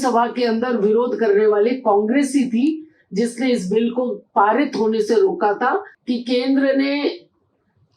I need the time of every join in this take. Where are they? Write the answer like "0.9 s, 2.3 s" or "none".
5.9 s